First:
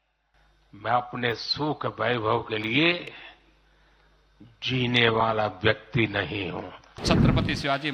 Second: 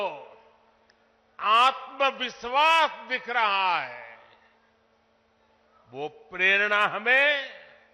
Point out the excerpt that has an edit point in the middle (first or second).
first